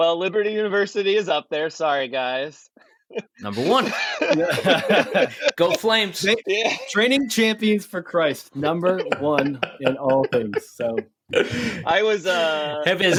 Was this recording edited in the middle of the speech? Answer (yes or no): no